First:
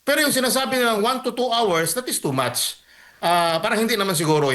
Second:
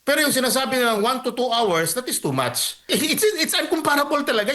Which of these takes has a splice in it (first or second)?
second